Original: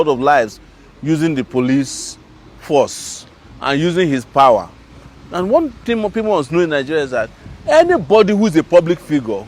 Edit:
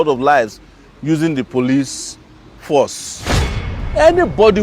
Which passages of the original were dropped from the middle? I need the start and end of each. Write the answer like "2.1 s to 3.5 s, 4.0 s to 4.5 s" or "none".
3.6 s to 7.3 s